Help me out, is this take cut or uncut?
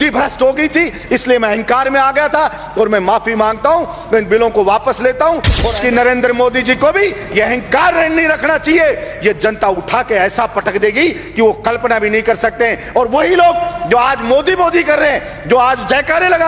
cut